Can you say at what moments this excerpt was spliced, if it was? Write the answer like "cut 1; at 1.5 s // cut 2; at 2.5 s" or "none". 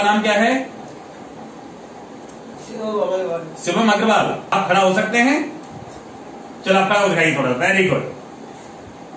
cut 1; at 4.5 s